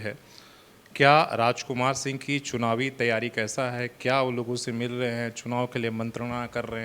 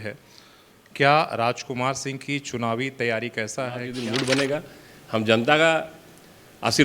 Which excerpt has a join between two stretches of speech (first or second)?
second